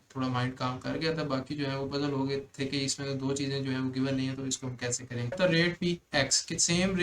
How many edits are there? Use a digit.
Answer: 1